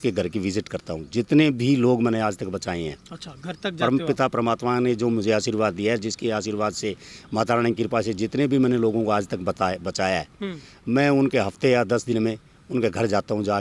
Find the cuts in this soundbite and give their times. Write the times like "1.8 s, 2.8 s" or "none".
none